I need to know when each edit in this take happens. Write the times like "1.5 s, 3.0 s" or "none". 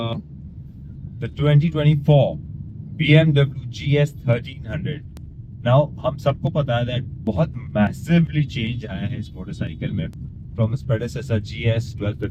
none

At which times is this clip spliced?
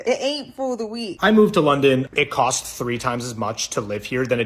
1.1 s, 2.1 s

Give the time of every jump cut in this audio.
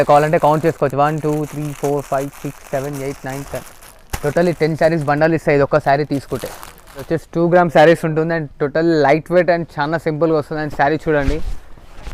7.0 s

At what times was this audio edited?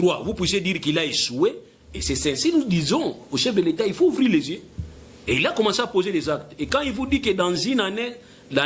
none

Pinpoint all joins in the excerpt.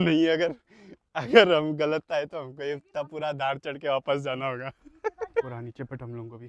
5.4 s

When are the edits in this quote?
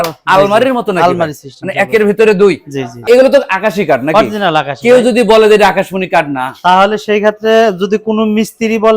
3.1 s

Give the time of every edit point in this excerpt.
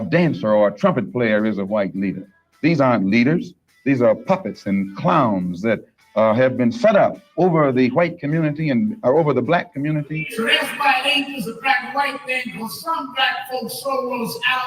10.2 s

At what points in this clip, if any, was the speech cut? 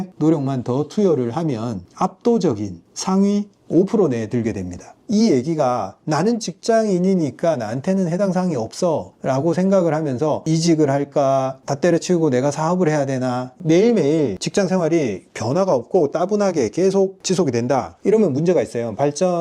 4.9 s, 13.5 s

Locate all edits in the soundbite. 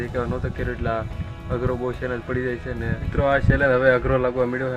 3.1 s

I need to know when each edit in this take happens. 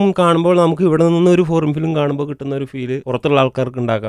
none

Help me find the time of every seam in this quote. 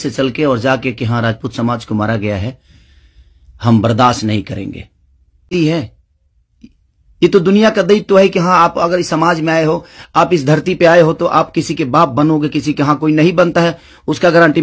5.5 s

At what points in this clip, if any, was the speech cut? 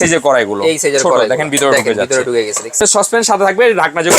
2.8 s

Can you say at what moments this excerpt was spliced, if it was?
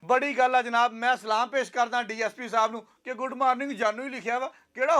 none

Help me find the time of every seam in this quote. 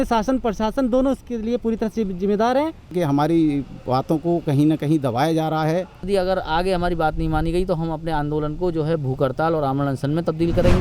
2.9 s, 6.1 s

